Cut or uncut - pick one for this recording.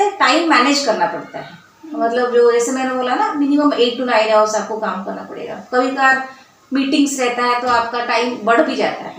uncut